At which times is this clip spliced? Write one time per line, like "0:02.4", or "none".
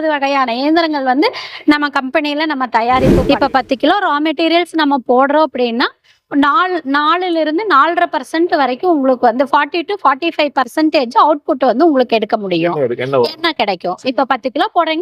0:03.2

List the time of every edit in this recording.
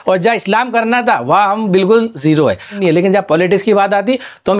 0:02.7

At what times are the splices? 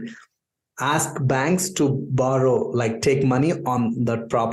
none

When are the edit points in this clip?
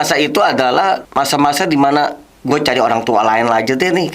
0:01.1
0:02.3

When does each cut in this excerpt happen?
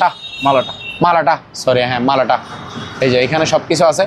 none

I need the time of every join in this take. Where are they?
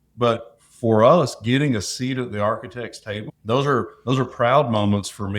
0:03.3

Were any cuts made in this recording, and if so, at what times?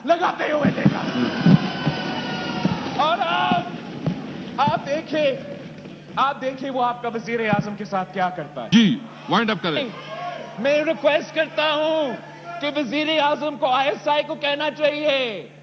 0:08.7

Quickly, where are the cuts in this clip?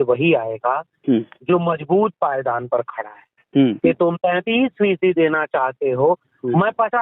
0:03.8

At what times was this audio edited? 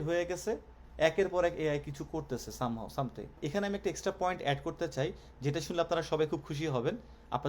0:03.4

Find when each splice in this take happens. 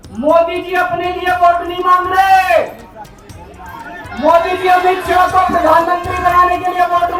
none

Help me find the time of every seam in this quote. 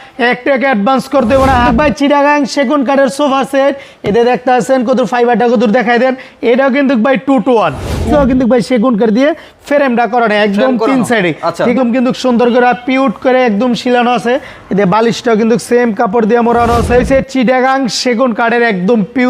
0:01.7
0:08.1
0:11.7
0:17.0

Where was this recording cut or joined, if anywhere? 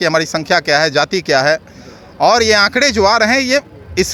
none

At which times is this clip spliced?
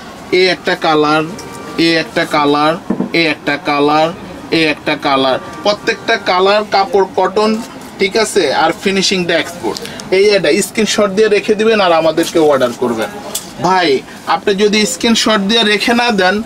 none

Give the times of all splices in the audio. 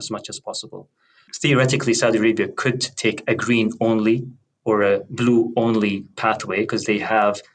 0:01.3

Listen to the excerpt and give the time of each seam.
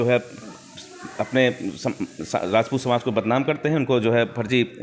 none

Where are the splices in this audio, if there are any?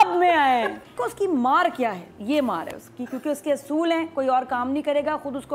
0:01.0

